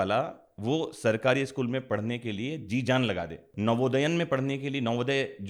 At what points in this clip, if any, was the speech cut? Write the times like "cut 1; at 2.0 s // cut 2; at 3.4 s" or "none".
cut 1; at 3.4 s